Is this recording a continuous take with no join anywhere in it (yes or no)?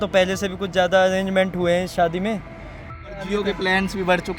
no